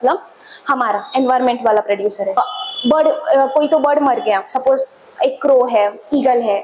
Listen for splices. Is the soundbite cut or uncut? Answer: cut